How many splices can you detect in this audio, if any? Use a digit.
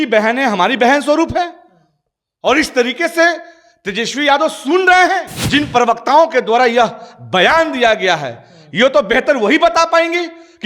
1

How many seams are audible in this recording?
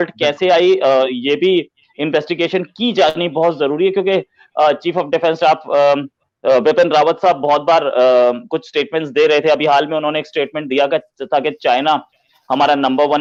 0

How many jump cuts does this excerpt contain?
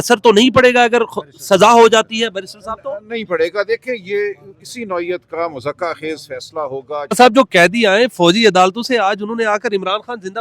1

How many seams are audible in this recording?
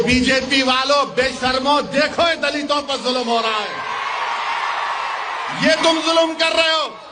0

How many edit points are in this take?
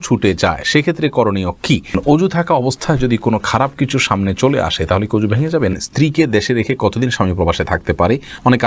2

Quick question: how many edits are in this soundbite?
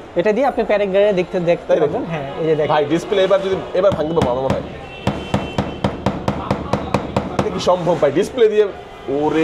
0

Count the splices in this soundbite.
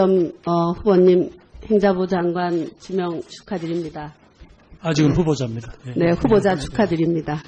0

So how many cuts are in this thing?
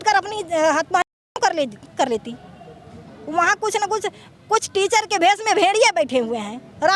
0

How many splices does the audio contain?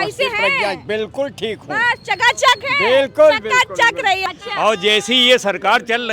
1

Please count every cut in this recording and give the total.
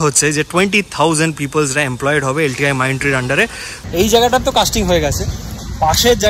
1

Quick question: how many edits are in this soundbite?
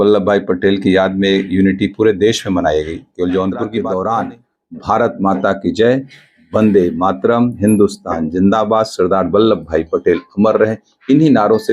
1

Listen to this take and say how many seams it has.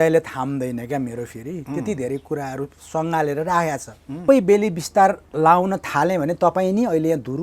1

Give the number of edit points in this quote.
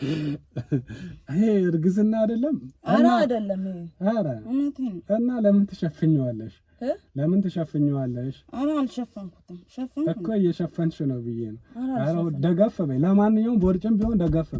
0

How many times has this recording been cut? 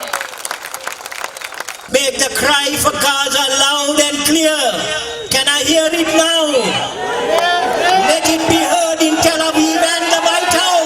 1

